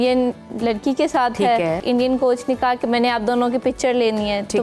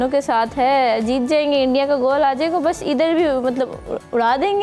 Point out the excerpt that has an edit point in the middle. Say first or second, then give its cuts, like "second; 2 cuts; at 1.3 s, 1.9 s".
first; 1 cut; at 1.8 s